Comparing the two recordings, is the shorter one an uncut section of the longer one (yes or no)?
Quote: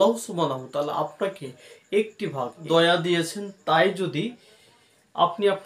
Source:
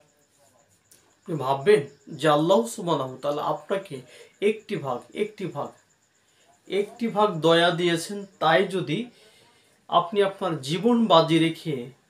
no